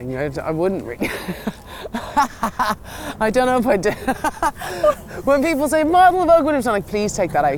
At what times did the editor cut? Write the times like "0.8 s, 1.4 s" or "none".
none